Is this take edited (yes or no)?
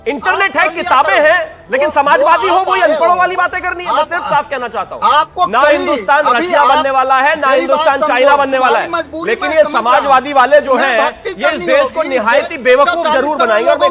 no